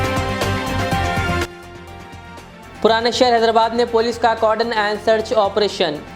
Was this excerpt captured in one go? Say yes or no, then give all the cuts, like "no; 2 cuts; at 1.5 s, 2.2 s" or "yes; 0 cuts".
yes; 0 cuts